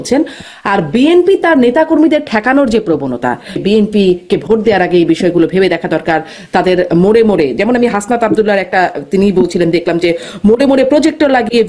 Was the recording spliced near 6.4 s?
no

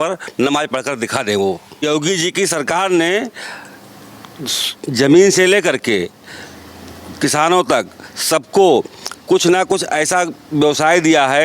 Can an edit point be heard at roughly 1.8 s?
yes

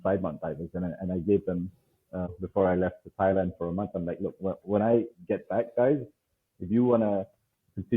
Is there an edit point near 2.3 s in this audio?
yes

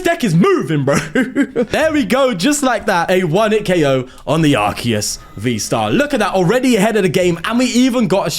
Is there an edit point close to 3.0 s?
yes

